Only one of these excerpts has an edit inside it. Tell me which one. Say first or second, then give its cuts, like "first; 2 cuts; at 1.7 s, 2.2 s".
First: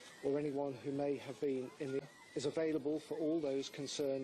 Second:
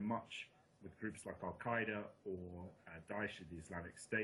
first; 1 cut; at 2.0 s